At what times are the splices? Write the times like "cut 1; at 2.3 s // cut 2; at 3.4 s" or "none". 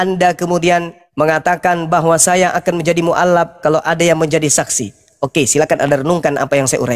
cut 1; at 1.0 s